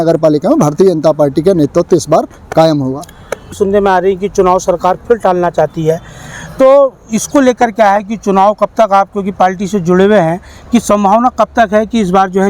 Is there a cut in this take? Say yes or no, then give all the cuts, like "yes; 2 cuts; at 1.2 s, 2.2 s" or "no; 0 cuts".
no; 0 cuts